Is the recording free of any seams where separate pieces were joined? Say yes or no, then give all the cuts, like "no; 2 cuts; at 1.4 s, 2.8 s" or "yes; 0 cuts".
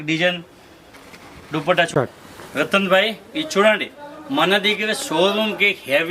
no; 1 cut; at 1.9 s